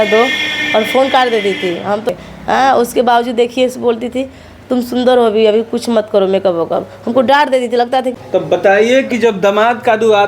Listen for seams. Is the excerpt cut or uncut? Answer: cut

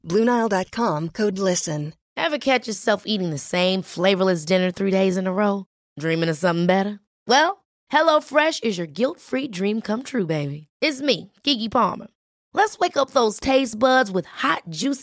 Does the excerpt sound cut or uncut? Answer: cut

